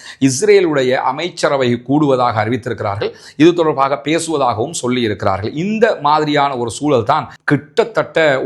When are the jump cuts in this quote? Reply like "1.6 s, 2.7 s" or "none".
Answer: 7.4 s